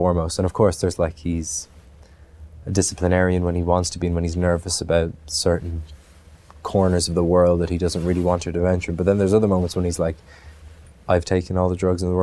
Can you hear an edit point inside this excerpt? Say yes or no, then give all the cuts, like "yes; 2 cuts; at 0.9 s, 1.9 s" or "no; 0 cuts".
no; 0 cuts